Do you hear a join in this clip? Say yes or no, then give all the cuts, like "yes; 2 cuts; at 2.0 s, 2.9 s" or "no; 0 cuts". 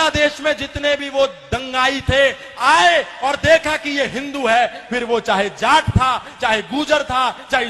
no; 0 cuts